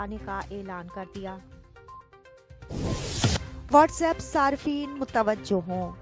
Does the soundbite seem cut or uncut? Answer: cut